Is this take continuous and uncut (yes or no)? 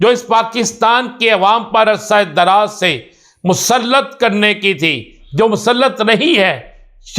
yes